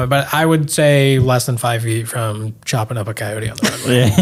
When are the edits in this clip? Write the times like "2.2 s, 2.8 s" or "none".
none